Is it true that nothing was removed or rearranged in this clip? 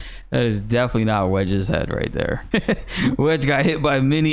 no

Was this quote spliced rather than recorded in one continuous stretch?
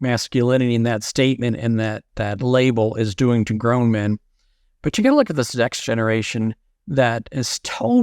yes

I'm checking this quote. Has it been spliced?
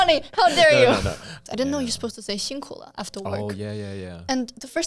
yes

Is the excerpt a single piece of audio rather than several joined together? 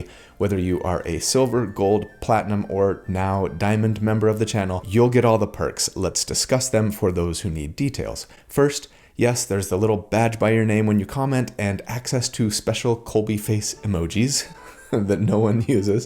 yes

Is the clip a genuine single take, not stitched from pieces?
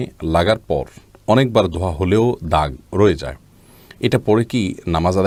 yes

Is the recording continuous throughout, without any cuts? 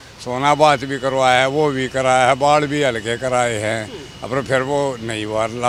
yes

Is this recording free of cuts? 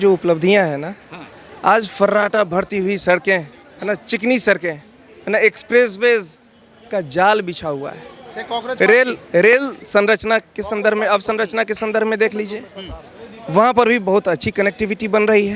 yes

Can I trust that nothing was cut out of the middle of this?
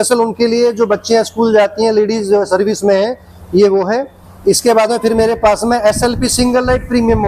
yes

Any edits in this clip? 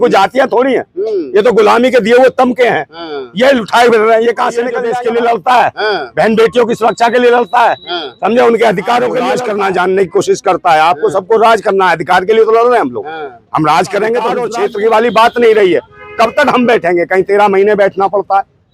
yes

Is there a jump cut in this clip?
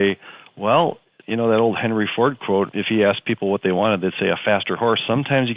yes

